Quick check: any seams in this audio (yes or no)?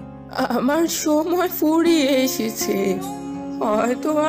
no